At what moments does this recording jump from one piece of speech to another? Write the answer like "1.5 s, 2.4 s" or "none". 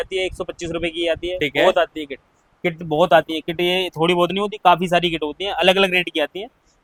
none